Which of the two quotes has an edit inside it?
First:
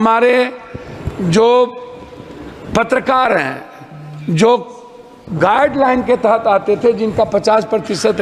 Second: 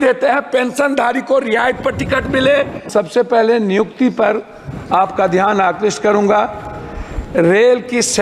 second; 1 cut; at 2.9 s

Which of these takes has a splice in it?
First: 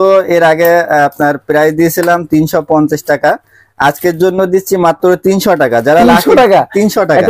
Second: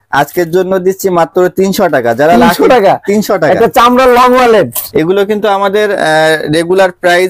second; 1 cut; at 4.8 s

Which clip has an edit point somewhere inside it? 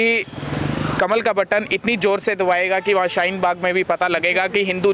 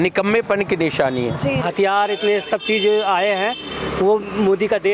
second; 1 cut; at 1.6 s

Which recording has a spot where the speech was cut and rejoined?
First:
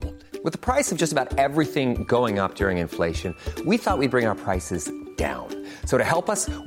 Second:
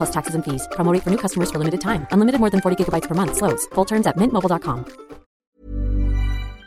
second; 1 cut; at 5.4 s

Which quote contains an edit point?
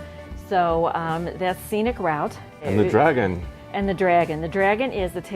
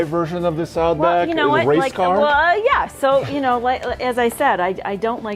first; 1 cut; at 2.7 s

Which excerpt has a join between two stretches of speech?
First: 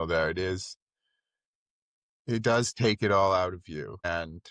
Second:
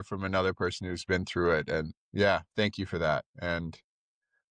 second; 1 cut; at 2.0 s

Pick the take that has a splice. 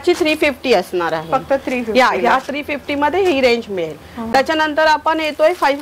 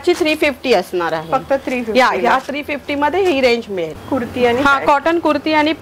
second; 1 cut; at 4.0 s

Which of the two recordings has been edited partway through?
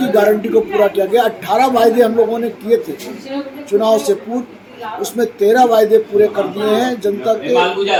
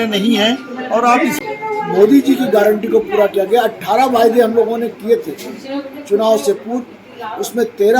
second; 1 cut; at 1.4 s

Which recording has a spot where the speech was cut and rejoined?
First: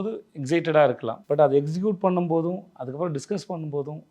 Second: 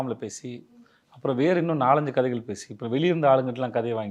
first; 1 cut; at 1.1 s

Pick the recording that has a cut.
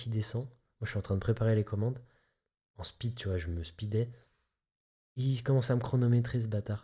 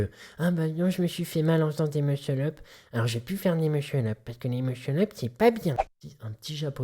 second; 1 cut; at 5.9 s

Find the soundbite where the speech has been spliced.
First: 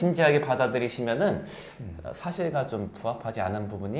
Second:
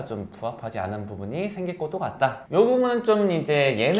second; 1 cut; at 2.4 s

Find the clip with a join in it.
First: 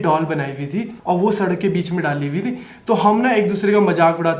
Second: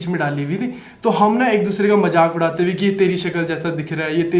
first; 1 cut; at 0.9 s

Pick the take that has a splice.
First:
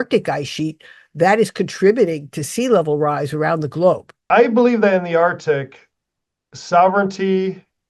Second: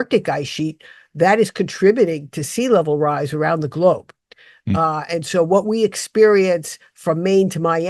first; 1 cut; at 4.1 s

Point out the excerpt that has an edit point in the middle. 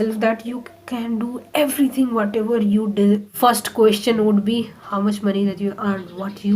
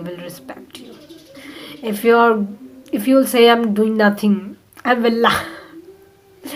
first; 1 cut; at 3.3 s

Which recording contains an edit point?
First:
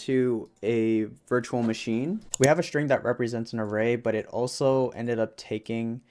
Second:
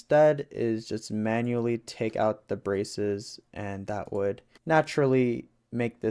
first; 1 cut; at 2.2 s

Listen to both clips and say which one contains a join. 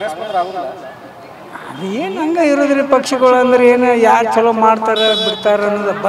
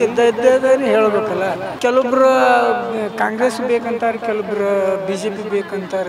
second; 1 cut; at 1.7 s

